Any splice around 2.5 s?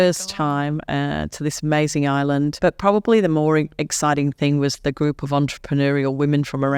yes; 1 cut; at 2.5 s

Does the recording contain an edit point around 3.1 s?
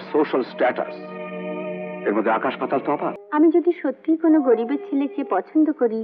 yes; 1 cut; at 3.1 s

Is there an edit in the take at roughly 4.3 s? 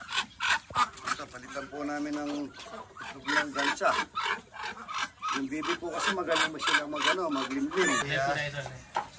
no; 1 cut; at 8.1 s

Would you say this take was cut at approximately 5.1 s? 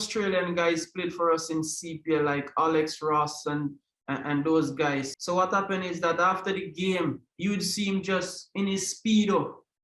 yes; 1 cut; at 5.1 s

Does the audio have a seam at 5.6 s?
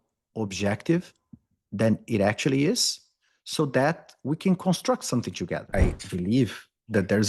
yes; 1 cut; at 5.6 s

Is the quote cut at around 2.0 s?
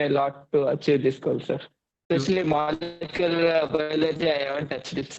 yes; 1 cut; at 2.0 s

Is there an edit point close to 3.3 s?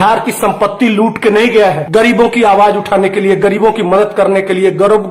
no; 1 cut; at 1.8 s

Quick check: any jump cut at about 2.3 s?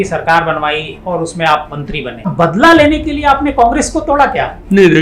yes; 1 cut; at 2.3 s

